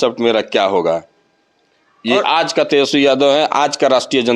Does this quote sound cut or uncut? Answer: uncut